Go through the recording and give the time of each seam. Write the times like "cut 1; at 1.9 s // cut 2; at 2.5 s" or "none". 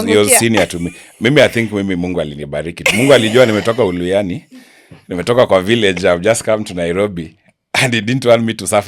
none